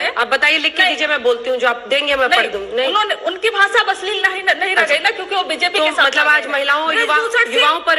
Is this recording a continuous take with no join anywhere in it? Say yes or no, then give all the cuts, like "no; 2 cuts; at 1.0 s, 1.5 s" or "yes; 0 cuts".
yes; 0 cuts